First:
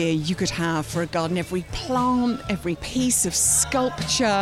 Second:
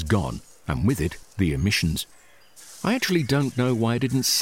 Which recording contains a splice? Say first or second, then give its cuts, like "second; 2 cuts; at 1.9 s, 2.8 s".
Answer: first; 1 cut; at 2.8 s